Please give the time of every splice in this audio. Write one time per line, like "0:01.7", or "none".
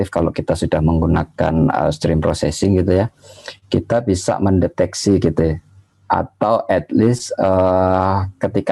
none